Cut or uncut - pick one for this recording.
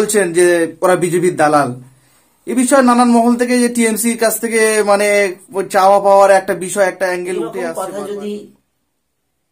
cut